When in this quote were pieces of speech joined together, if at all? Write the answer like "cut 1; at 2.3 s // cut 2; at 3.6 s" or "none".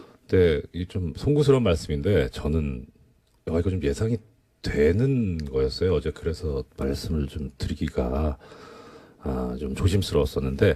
none